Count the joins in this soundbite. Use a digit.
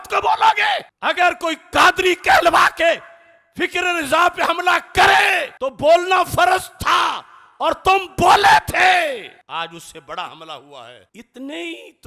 0